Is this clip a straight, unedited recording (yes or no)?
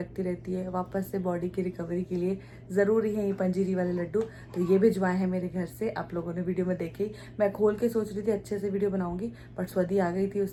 yes